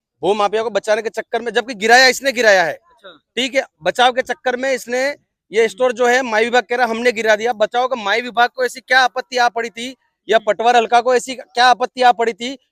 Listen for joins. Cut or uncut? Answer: uncut